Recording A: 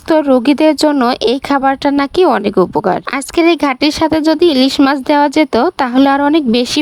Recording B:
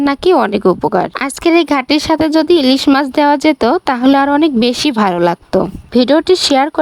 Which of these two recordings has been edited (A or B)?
B